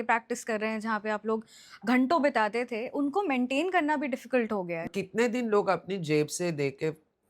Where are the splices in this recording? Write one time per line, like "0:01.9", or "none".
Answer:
0:04.9